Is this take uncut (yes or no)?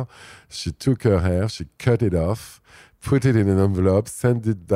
yes